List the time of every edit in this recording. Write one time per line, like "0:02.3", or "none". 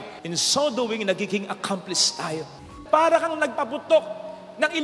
0:02.7

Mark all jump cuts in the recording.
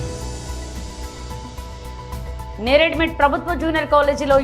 0:01.0

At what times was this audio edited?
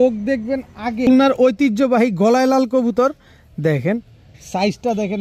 0:01.1

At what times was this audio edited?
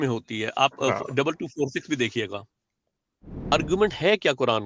0:03.5

